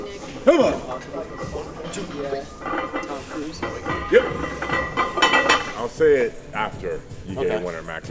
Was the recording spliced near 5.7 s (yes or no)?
yes